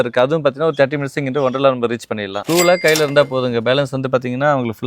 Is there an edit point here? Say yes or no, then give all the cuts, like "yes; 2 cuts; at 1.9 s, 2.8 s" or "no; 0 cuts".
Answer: yes; 1 cut; at 2.3 s